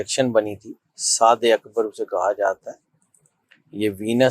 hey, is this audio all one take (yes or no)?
yes